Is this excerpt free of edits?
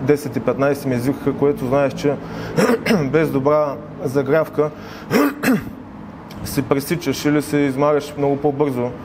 yes; 0 cuts

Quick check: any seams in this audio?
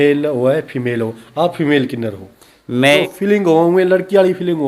yes; 1 cut; at 3.0 s

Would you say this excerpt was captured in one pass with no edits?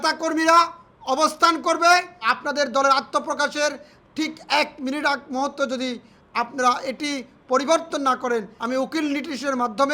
no; 2 cuts; at 2.4 s, 8.6 s

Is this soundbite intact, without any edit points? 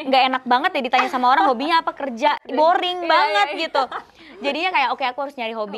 yes; 0 cuts

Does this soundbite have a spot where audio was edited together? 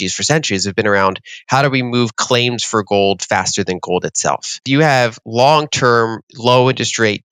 yes; 1 cut; at 4.5 s

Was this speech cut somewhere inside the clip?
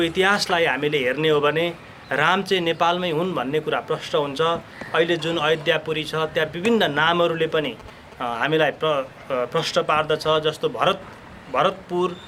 no; 0 cuts

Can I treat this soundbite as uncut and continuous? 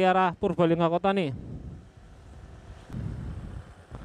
no; 1 cut; at 2.9 s

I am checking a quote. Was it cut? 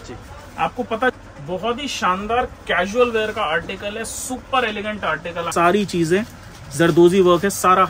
yes; 2 cuts; at 1.1 s, 5.5 s

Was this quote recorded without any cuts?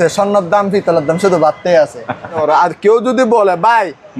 no; 1 cut; at 2.4 s

